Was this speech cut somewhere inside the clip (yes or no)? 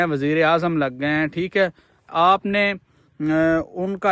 yes